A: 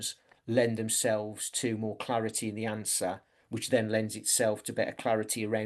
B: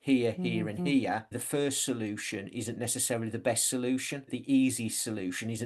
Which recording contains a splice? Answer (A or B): B